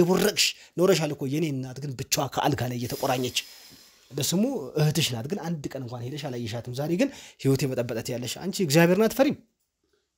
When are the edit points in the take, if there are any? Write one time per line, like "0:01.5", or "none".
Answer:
none